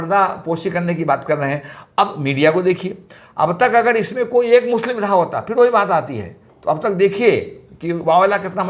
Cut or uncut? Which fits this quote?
uncut